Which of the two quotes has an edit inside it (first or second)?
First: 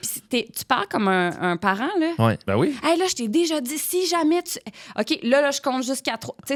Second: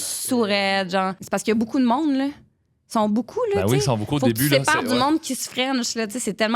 second